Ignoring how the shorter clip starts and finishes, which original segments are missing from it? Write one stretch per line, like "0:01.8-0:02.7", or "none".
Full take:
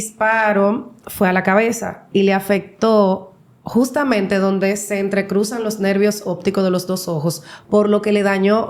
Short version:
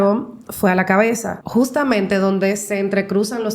0:01.9-0:03.5